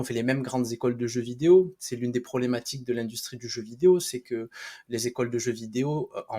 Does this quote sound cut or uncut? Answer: uncut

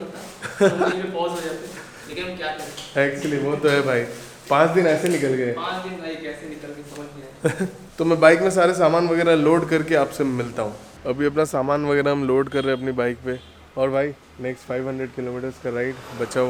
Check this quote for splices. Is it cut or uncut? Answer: uncut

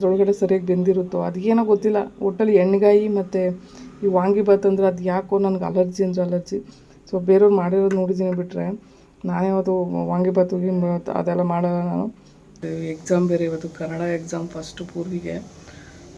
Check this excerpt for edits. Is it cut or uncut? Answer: cut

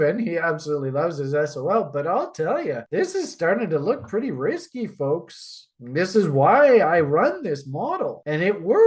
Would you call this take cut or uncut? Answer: uncut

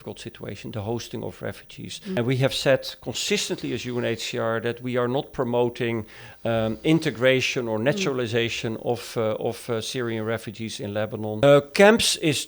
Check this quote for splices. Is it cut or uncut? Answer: cut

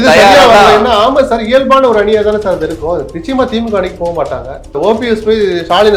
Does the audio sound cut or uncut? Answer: cut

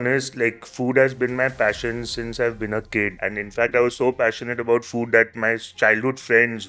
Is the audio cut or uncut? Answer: cut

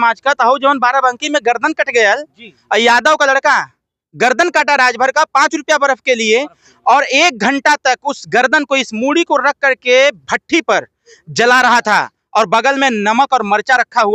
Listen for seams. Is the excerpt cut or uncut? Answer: uncut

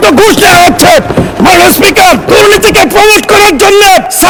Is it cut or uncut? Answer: uncut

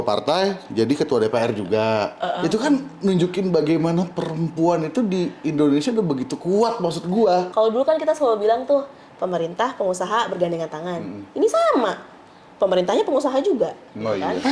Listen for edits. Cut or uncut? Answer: cut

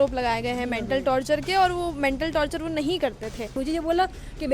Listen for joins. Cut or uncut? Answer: cut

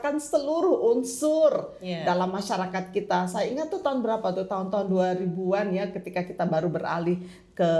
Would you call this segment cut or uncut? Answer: uncut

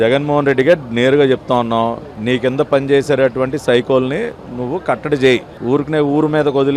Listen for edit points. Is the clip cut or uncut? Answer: uncut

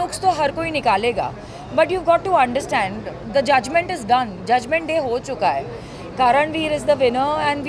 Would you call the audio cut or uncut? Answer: uncut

